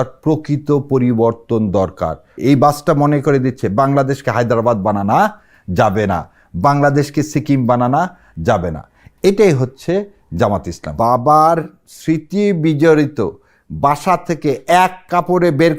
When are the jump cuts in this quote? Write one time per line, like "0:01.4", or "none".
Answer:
0:02.2
0:10.9